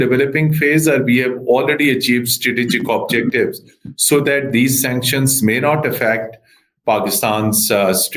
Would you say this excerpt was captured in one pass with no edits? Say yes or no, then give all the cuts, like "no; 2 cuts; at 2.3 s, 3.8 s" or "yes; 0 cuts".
yes; 0 cuts